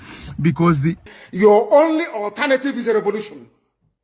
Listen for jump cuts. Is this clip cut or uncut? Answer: cut